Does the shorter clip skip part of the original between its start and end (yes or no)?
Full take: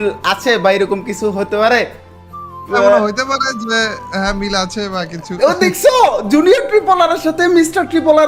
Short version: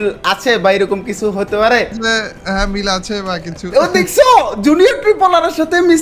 yes